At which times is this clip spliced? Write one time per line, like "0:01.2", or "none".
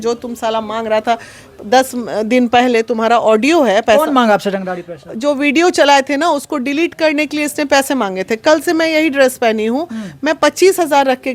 none